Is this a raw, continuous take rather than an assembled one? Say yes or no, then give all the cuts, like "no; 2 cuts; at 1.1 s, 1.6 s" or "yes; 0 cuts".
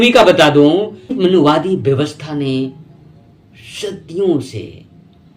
no; 1 cut; at 1.2 s